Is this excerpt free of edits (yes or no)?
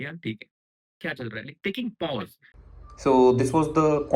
no